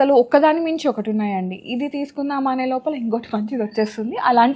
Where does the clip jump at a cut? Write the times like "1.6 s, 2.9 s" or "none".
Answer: none